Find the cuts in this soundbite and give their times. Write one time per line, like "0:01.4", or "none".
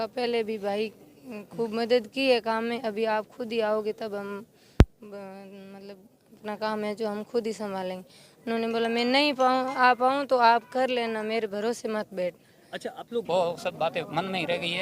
0:13.2